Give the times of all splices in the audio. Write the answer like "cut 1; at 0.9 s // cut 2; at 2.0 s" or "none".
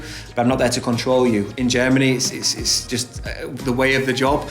cut 1; at 1.5 s // cut 2; at 2.9 s